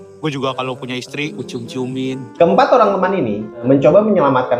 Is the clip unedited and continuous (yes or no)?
no